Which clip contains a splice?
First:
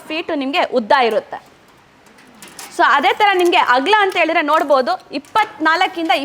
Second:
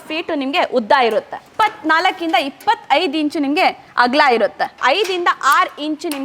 second; 2 cuts; at 1.4 s, 4.8 s

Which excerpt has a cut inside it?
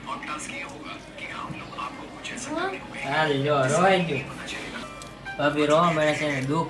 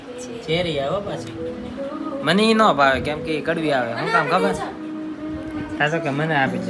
first; 1 cut; at 4.7 s

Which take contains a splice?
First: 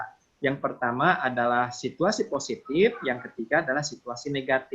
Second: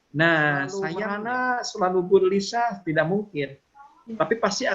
second; 1 cut; at 0.9 s

